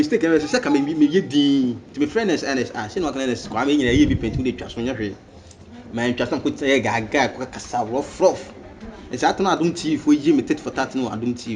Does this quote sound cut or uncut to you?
uncut